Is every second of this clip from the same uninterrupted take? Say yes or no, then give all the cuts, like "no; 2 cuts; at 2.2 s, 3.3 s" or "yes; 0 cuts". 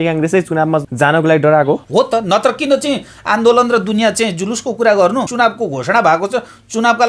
no; 3 cuts; at 0.9 s, 1.8 s, 5.3 s